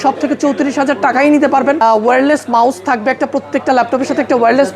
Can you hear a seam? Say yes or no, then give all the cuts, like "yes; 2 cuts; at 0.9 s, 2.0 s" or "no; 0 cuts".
yes; 1 cut; at 1.8 s